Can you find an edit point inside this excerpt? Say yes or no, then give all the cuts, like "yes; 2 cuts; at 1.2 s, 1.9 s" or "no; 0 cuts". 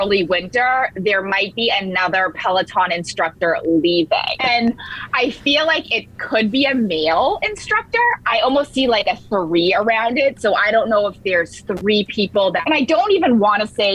yes; 3 cuts; at 4.3 s, 8.2 s, 12.6 s